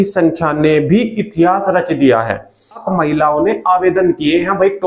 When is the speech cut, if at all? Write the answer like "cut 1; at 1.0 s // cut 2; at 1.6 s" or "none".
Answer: cut 1; at 2.9 s